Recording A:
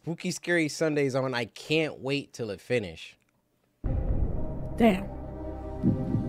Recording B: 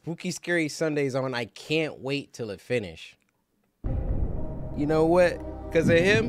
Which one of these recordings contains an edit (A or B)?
B